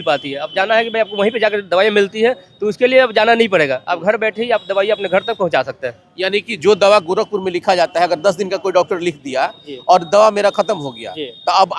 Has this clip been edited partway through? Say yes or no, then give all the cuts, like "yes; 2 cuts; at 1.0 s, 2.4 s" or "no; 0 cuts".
no; 0 cuts